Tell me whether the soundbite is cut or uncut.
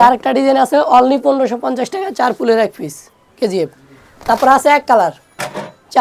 uncut